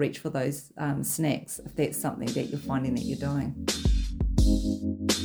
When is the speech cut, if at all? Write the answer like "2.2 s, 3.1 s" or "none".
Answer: 3.5 s